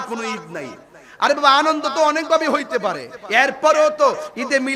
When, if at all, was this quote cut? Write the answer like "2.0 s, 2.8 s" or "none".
3.1 s